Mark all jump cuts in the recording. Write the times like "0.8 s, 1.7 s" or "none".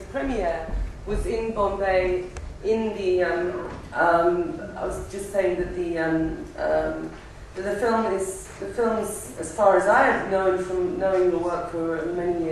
4.0 s